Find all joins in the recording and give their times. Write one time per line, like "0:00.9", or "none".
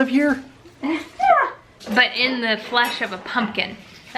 0:01.6